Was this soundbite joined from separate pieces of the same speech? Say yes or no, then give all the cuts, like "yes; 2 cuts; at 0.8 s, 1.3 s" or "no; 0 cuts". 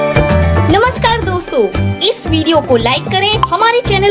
no; 0 cuts